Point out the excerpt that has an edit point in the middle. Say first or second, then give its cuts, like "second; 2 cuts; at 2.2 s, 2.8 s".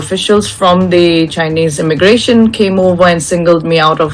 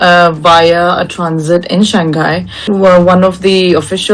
second; 1 cut; at 2.6 s